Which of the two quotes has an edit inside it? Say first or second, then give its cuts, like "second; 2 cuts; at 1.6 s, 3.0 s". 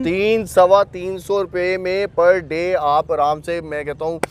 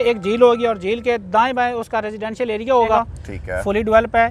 second; 1 cut; at 3.0 s